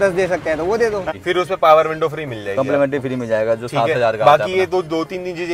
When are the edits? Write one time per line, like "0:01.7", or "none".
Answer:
0:01.1